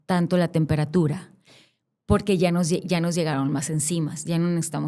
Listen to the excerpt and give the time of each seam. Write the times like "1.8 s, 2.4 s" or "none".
none